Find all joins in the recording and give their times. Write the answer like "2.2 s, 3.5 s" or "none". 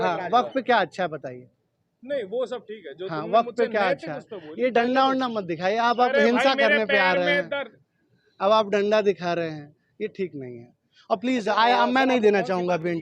none